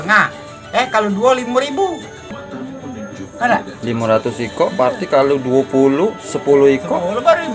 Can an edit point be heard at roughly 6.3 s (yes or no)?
no